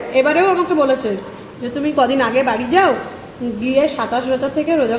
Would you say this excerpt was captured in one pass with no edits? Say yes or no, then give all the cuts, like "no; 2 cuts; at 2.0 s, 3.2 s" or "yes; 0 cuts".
yes; 0 cuts